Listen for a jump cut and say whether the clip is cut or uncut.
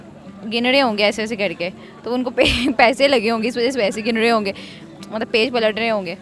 uncut